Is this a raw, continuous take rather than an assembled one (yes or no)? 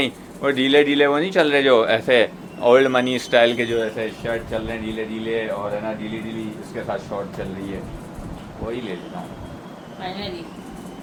yes